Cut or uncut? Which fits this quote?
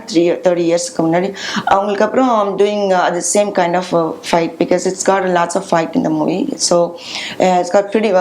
uncut